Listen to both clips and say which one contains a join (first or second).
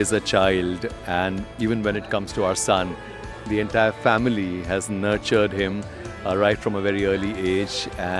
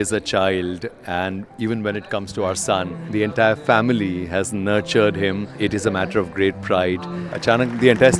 second